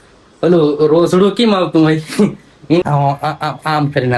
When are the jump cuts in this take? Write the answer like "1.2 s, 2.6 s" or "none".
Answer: 2.8 s